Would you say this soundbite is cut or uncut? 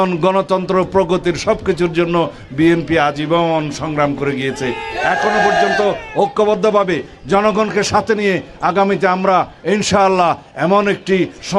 uncut